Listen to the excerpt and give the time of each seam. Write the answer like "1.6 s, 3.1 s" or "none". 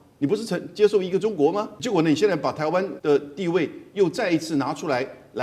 1.8 s, 2.9 s

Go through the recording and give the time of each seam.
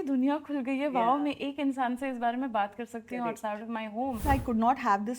4.2 s

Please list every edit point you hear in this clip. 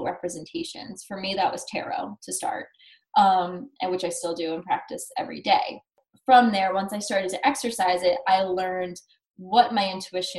5.9 s

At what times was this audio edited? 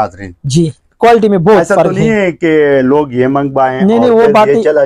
none

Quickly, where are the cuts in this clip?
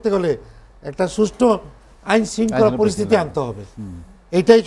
none

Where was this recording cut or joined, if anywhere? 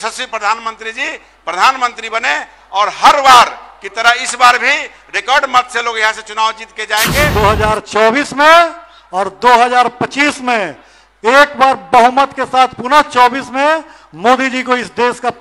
7.3 s

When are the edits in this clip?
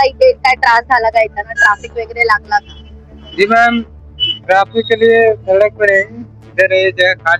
none

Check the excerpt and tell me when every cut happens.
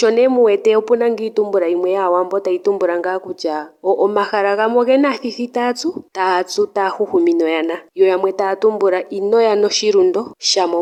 none

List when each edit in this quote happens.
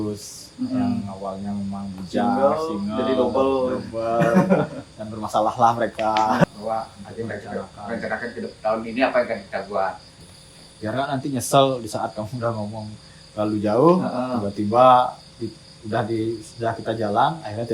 6.4 s, 10.1 s

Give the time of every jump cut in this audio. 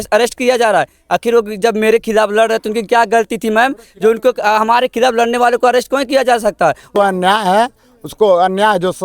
7.0 s

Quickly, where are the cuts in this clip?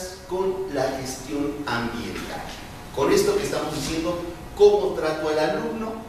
none

